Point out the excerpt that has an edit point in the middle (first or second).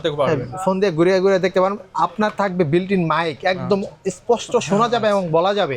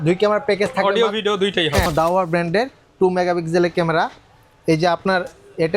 second